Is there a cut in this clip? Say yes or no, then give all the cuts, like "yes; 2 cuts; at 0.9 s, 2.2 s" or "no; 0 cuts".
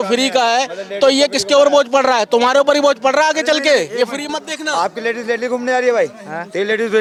no; 0 cuts